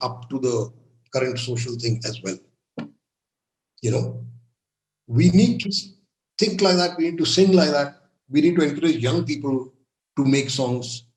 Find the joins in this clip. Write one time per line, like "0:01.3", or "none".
none

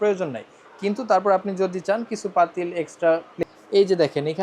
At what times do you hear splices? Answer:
0:03.3

